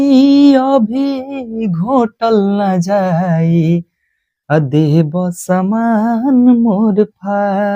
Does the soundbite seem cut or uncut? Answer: uncut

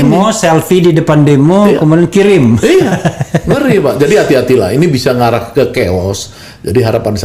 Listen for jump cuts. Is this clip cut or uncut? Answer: uncut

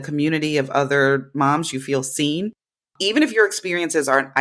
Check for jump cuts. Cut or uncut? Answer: uncut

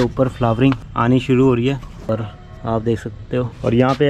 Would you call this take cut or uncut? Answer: cut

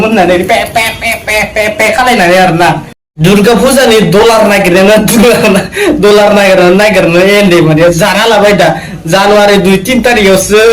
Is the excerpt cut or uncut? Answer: cut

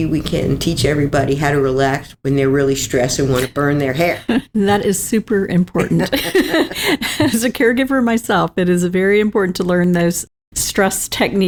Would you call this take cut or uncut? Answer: uncut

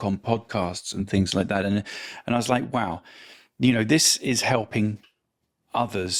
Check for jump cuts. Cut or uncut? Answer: uncut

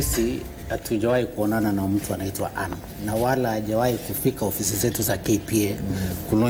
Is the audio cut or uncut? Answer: uncut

